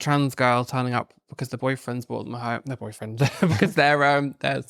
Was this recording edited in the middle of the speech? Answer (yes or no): no